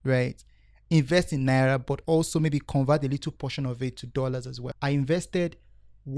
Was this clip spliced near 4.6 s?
yes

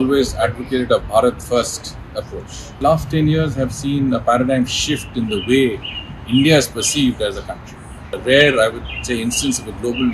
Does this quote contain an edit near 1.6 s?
no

